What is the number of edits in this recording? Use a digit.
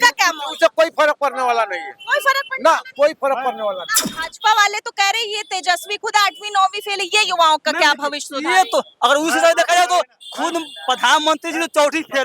1